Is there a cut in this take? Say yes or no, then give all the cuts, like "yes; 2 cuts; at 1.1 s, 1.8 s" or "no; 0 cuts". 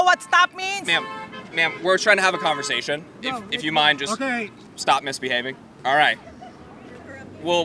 yes; 3 cuts; at 3.2 s, 4.6 s, 5.7 s